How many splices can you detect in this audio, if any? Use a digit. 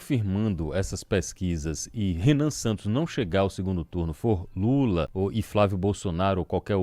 1